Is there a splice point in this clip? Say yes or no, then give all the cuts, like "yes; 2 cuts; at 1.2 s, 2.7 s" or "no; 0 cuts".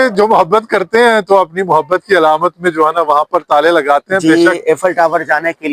yes; 1 cut; at 4.2 s